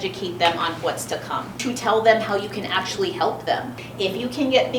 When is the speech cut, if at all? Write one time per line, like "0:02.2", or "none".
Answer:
0:01.6
0:03.7